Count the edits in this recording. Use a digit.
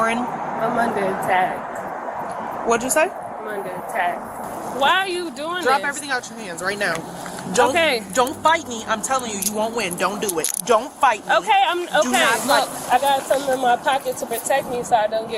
2